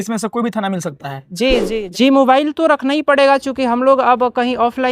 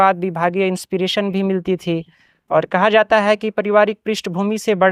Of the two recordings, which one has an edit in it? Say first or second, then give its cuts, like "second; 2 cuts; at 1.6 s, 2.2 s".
first; 1 cut; at 1.6 s